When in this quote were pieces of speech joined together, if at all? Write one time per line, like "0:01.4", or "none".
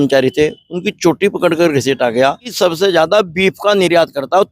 0:02.5